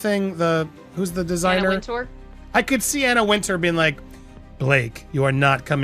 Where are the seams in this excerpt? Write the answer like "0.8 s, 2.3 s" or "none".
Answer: none